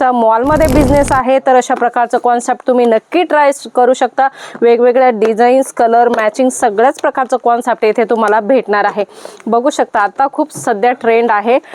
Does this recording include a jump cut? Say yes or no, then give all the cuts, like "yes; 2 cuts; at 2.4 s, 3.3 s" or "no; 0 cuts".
no; 0 cuts